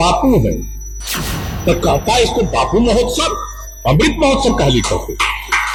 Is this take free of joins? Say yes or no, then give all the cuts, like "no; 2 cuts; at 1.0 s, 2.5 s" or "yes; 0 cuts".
yes; 0 cuts